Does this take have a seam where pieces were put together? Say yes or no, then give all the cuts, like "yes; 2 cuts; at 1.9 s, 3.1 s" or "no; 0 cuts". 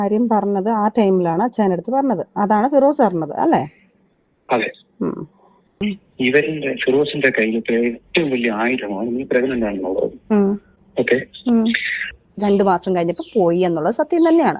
no; 0 cuts